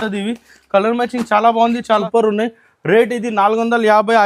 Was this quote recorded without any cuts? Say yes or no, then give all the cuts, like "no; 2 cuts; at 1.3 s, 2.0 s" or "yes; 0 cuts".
no; 1 cut; at 2.0 s